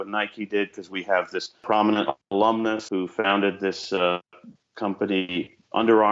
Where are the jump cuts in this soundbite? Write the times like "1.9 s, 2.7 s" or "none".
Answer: 1.6 s, 2.8 s